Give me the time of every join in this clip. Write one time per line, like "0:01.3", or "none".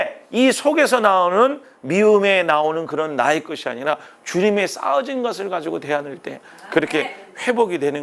none